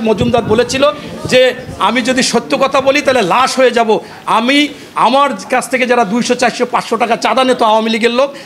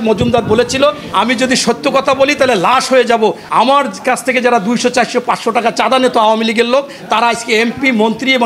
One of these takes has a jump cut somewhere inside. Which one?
second; 2 cuts; at 1.0 s, 3.4 s

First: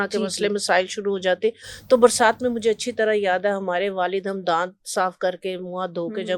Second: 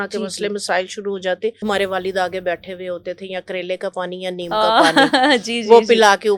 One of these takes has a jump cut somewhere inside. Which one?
second; 1 cut; at 1.6 s

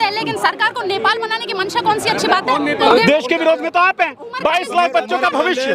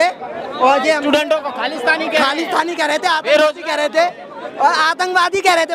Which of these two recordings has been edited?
first; 1 cut; at 2.9 s

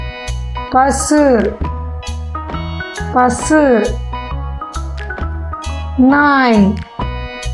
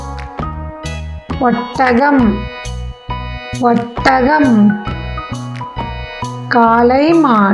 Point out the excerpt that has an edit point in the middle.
first; 4 cuts; at 1.5 s, 3.1 s, 4.2 s, 5.7 s

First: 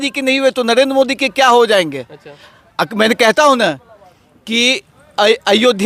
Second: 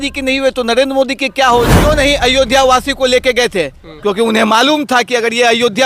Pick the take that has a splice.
second; 1 cut; at 1.8 s

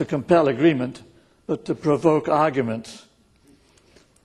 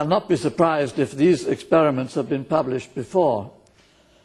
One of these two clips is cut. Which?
first; 1 cut; at 0.9 s

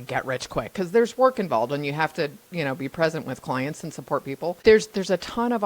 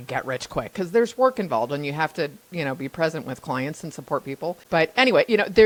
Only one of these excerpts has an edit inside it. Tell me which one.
first; 1 cut; at 4.6 s

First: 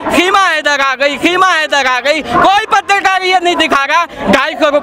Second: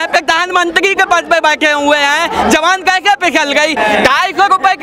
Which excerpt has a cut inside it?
second; 1 cut; at 3.8 s

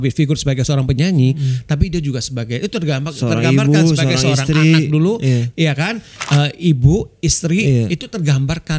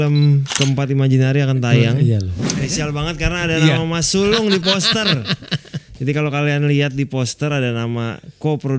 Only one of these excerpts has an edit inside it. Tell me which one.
second; 1 cut; at 2.3 s

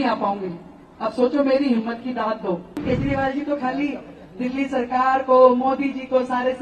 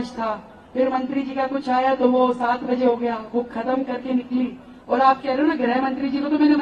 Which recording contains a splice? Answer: first; 1 cut; at 2.8 s

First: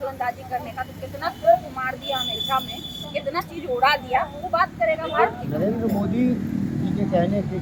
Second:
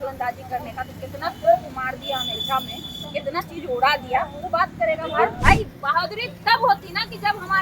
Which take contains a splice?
second; 1 cut; at 5.4 s

